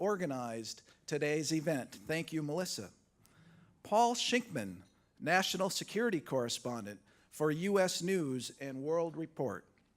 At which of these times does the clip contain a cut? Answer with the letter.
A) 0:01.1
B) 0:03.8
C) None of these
B